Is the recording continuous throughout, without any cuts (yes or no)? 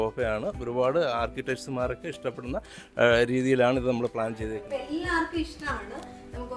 no